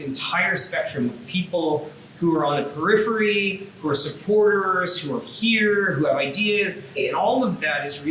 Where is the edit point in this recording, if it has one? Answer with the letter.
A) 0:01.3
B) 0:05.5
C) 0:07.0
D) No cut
C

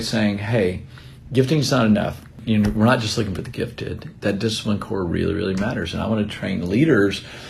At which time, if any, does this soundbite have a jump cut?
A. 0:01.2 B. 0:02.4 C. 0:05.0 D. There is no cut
B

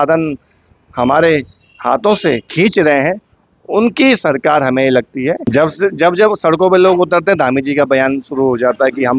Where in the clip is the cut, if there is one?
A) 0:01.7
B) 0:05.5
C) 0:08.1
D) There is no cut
B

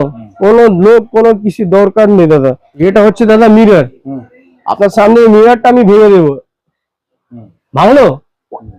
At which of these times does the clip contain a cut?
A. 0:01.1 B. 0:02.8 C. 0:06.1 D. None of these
B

